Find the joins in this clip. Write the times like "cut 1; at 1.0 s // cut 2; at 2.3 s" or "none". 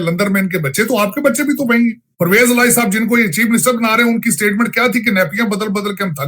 cut 1; at 2.1 s